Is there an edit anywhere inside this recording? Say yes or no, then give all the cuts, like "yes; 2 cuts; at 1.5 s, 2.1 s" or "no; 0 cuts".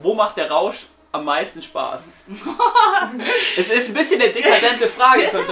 no; 0 cuts